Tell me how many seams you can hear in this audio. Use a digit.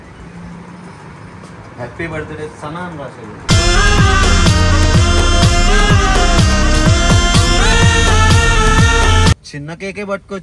1